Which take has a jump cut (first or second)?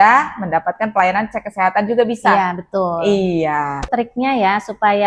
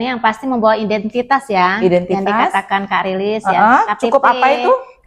first